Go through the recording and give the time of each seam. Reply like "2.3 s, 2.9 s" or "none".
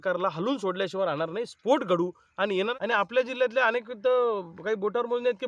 2.7 s